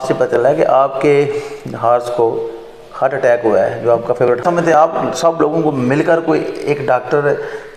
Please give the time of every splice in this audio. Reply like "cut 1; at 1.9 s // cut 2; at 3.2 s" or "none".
cut 1; at 4.4 s